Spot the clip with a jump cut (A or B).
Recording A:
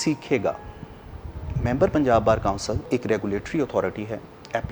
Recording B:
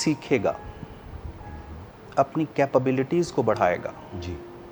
A